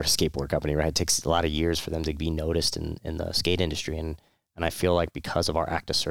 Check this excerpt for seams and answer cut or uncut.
uncut